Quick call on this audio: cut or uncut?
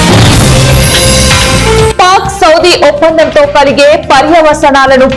cut